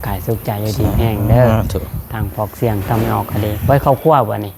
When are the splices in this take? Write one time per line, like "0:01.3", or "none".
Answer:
none